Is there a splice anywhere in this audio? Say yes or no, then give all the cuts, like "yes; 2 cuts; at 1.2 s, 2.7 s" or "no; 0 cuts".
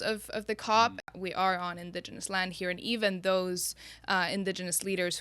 yes; 1 cut; at 1.0 s